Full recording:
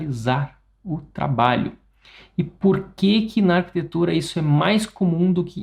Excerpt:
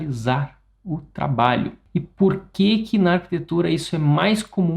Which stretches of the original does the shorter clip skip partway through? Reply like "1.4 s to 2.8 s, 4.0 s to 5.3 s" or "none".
1.8 s to 2.2 s